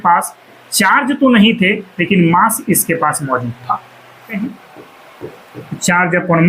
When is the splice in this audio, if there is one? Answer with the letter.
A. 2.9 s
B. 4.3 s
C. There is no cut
B